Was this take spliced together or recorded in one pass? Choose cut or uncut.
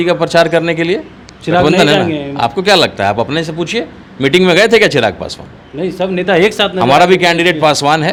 uncut